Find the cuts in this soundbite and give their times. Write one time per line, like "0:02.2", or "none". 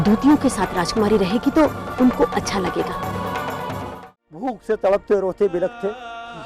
0:03.9